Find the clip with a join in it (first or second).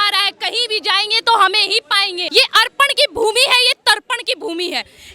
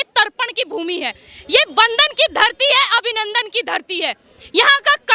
first